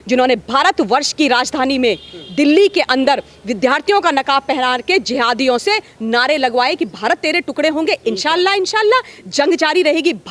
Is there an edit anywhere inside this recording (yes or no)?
no